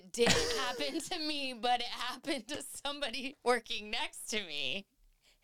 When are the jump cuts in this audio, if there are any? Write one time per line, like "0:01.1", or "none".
none